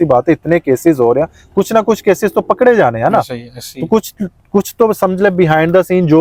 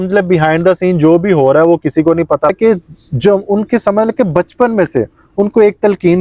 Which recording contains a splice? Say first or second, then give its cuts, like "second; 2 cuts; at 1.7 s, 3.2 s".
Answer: second; 1 cut; at 2.5 s